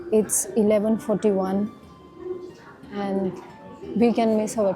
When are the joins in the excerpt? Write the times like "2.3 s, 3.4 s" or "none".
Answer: none